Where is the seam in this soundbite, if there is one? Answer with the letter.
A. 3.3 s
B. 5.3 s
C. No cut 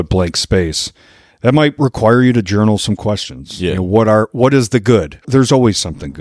B